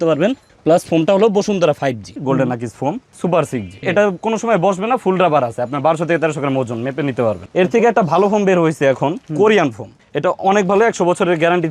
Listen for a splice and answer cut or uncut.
cut